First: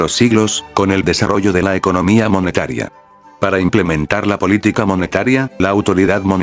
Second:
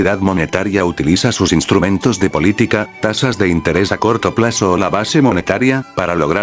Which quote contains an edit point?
first; 2 cuts; at 0.8 s, 3.2 s

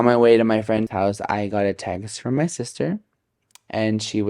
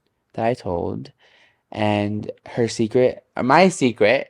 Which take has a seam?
first; 1 cut; at 0.9 s

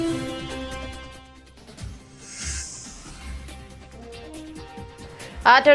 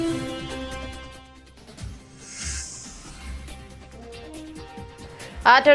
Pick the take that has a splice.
second; 2 cuts; at 2.1 s, 3.5 s

